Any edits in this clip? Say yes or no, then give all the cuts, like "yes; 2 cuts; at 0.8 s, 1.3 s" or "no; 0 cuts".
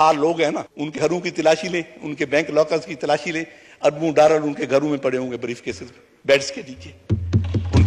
yes; 1 cut; at 1.0 s